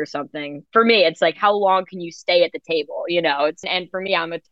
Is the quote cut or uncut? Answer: cut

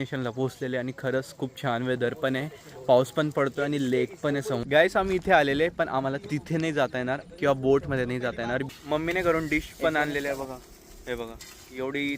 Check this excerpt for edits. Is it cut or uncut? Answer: cut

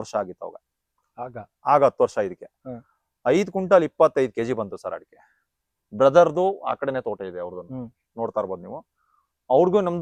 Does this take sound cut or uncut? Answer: uncut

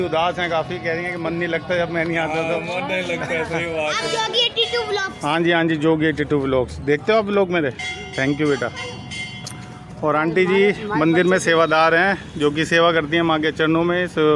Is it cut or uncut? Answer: uncut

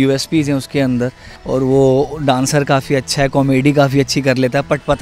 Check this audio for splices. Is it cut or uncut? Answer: cut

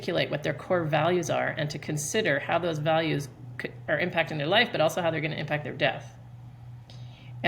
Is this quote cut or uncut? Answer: uncut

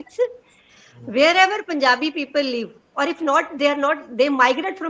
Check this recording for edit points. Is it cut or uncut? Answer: uncut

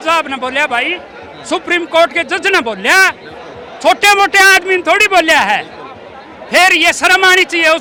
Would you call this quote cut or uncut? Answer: uncut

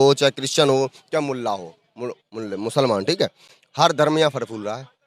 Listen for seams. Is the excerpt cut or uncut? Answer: uncut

